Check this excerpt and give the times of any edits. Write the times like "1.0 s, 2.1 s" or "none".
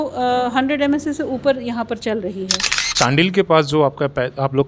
2.8 s